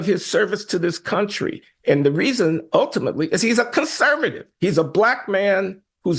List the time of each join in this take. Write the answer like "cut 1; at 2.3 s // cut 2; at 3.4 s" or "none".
none